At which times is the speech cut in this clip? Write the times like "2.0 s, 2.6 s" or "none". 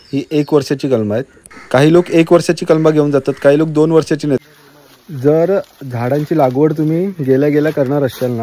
4.4 s